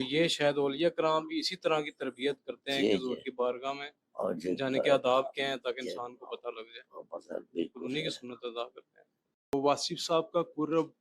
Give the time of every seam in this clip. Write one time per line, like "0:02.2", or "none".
0:09.5

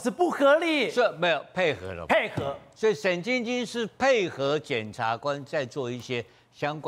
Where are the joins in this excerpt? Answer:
none

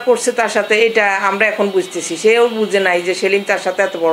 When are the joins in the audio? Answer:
none

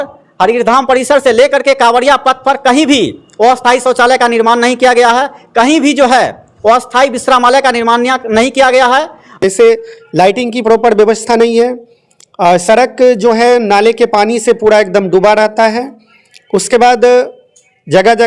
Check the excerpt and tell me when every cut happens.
0:09.3

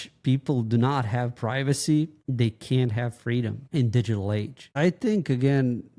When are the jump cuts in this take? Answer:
0:02.2
0:03.6
0:04.7

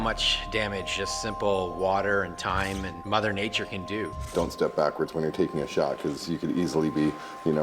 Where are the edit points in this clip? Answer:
0:03.0
0:04.3

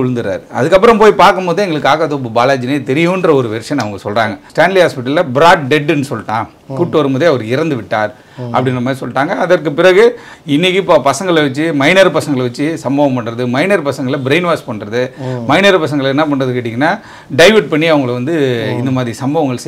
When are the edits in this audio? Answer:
0:04.4
0:10.3

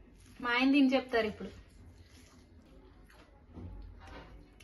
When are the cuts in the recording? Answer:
0:02.7

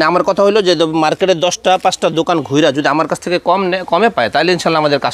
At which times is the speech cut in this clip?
none

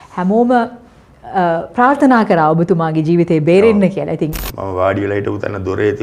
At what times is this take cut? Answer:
0:04.3

